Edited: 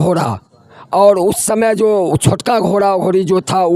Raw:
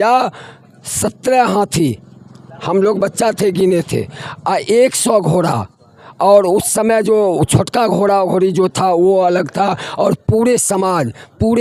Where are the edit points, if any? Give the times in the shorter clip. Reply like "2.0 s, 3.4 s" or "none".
none